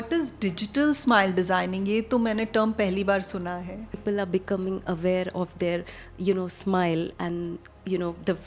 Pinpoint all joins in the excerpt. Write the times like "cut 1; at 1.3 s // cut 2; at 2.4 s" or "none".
cut 1; at 4.0 s

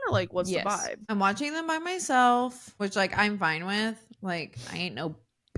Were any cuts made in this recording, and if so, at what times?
cut 1; at 1.0 s // cut 2; at 2.6 s

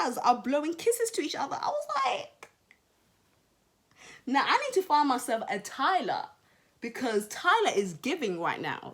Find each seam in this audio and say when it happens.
none

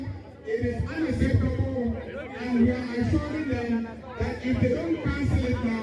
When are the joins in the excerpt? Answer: none

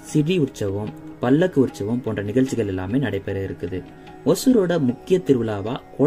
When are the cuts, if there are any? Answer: none

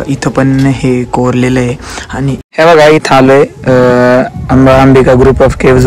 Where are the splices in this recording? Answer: cut 1; at 2.5 s

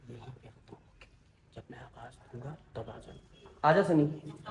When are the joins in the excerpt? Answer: none

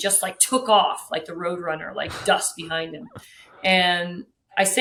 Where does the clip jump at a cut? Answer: none

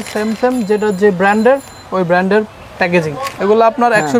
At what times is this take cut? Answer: none

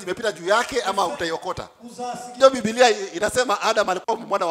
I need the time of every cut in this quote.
cut 1; at 2.4 s

